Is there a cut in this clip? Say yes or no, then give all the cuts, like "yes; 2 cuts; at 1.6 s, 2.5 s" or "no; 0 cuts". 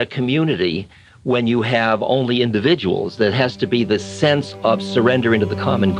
no; 0 cuts